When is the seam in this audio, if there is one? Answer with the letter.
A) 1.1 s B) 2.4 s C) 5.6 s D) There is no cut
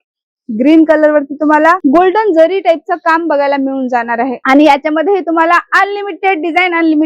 D